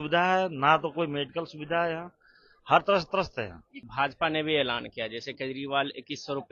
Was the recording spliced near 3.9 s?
yes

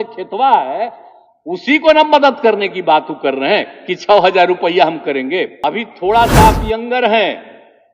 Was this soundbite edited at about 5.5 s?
yes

